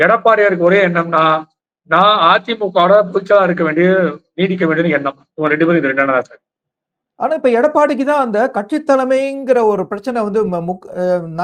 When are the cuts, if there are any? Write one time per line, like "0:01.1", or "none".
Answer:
none